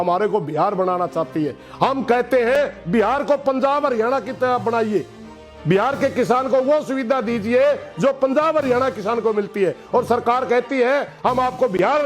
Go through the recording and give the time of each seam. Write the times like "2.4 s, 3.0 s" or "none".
11.1 s